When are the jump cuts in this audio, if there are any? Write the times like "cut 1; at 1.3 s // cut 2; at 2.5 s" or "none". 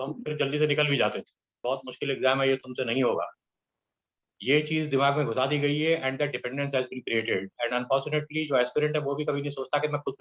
cut 1; at 1.6 s